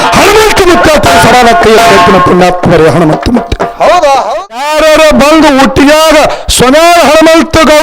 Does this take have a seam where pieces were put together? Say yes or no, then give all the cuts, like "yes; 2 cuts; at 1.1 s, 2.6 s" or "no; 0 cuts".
yes; 1 cut; at 4.6 s